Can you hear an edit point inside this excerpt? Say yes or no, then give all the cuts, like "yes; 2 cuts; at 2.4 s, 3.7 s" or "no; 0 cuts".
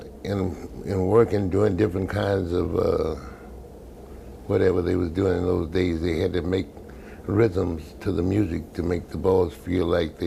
yes; 1 cut; at 6.3 s